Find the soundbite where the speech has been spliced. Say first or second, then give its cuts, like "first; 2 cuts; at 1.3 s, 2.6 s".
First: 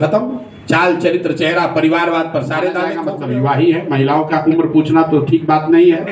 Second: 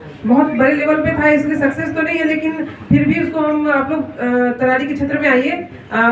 first; 1 cut; at 3.0 s